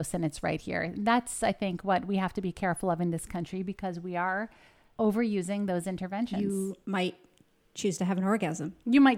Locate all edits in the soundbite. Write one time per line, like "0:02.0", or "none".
0:04.9
0:06.3